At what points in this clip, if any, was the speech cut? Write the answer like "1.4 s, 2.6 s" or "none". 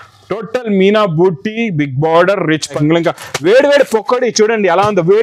2.8 s